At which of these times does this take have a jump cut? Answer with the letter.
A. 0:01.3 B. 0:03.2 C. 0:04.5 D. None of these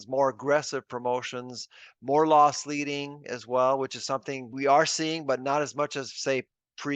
C